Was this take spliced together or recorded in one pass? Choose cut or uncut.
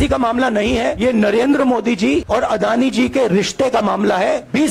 cut